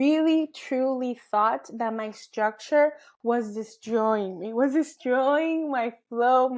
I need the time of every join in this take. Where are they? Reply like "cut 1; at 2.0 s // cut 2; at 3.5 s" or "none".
none